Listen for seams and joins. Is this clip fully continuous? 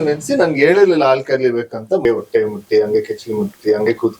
no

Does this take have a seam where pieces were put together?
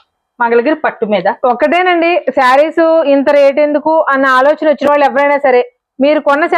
no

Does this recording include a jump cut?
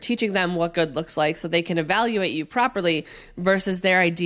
no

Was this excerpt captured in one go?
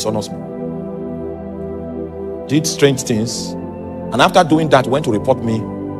yes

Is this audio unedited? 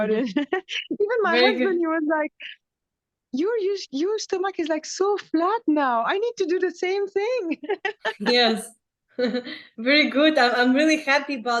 yes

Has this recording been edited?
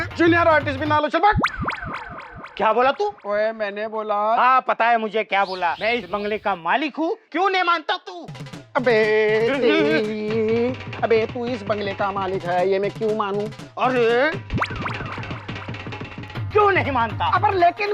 yes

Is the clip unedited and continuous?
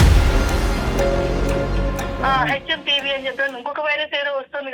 no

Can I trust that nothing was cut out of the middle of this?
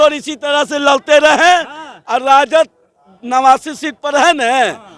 yes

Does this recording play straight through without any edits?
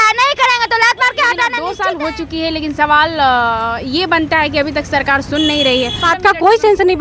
no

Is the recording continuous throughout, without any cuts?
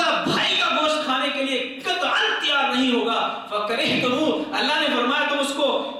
yes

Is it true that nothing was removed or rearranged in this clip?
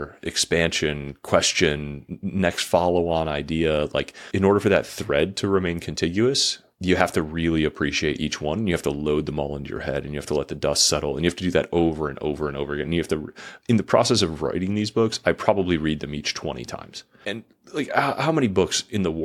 yes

